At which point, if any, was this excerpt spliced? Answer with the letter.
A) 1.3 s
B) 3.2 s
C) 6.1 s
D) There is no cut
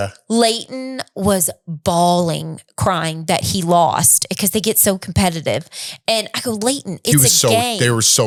D